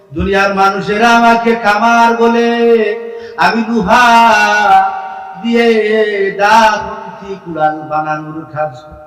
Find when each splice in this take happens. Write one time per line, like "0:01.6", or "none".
none